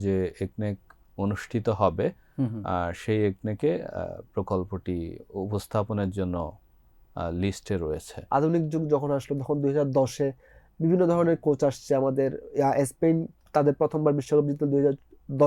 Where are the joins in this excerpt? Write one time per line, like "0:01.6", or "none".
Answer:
0:08.2

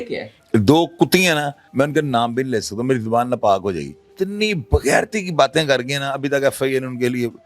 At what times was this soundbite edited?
0:01.6
0:04.0

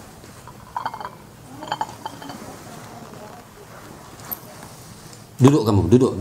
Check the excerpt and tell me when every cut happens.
none

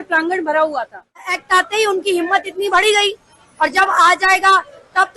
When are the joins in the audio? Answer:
0:01.4

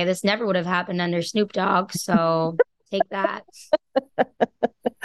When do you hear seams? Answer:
0:02.8

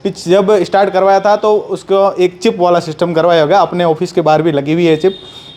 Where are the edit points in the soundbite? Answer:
none

